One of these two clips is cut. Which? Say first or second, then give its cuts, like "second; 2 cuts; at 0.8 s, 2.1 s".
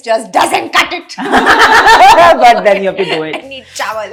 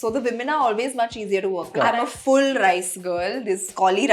second; 1 cut; at 1.7 s